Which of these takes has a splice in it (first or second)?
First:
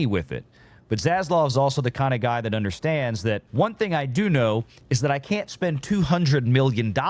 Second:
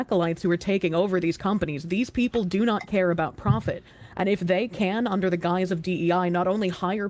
first